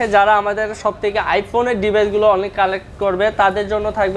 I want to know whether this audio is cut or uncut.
uncut